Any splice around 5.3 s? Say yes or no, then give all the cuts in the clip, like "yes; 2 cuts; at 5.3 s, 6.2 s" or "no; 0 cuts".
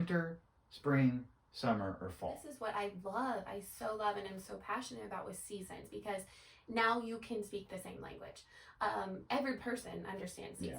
no; 1 cut; at 2.5 s